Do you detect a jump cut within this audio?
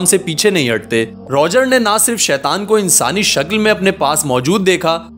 yes; 1 cut; at 1.2 s

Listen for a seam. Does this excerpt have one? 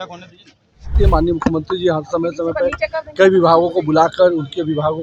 yes; 1 cut; at 0.9 s

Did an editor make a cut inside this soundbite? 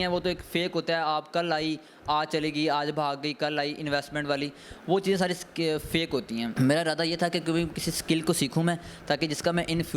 no; 0 cuts

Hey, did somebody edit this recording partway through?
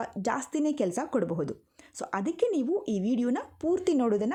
no; 0 cuts

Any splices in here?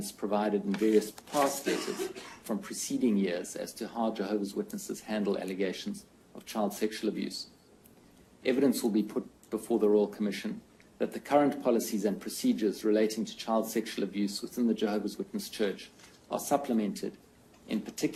no; 0 cuts

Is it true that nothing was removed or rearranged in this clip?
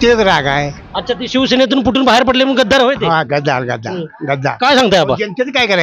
yes; 0 cuts

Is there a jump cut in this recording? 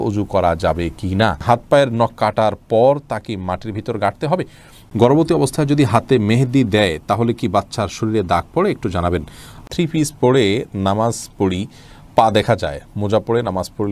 yes; 3 cuts; at 1.4 s, 4.8 s, 9.6 s

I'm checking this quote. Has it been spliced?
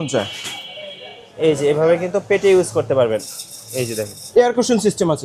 yes; 1 cut; at 4.2 s

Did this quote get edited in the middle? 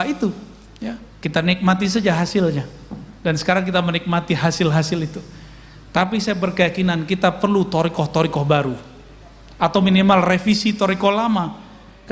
no; 0 cuts

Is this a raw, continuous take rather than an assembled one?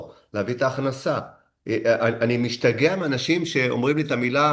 yes; 0 cuts

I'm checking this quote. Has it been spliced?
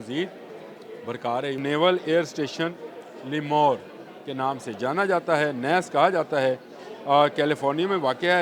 yes; 1 cut; at 1.6 s

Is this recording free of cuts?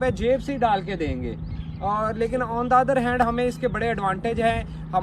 yes; 0 cuts

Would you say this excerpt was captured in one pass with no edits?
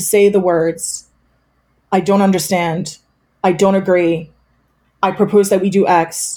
yes; 0 cuts

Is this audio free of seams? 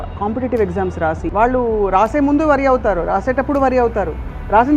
no; 1 cut; at 1.2 s

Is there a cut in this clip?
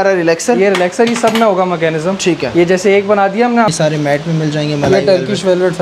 yes; 1 cut; at 3.7 s

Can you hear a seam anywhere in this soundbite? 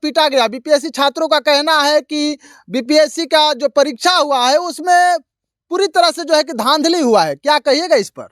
no; 0 cuts

